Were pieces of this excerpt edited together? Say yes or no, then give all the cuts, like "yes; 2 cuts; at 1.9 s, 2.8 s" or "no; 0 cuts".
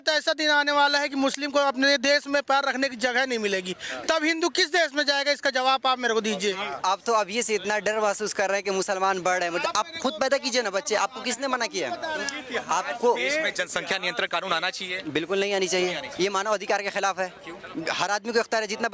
no; 0 cuts